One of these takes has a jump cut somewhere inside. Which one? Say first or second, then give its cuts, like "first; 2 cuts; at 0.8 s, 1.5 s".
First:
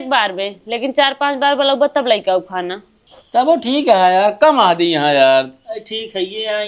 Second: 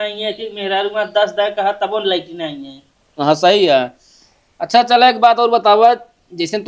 first; 1 cut; at 2.8 s